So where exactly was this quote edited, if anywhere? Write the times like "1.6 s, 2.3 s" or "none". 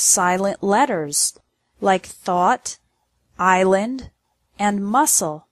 none